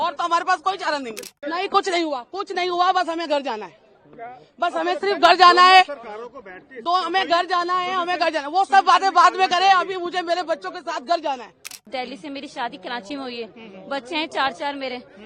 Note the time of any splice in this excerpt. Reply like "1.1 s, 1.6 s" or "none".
1.2 s, 11.8 s